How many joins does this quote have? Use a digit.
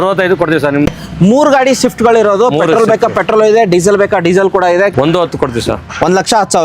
2